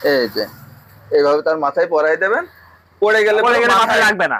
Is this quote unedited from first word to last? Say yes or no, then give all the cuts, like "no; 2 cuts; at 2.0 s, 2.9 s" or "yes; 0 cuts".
yes; 0 cuts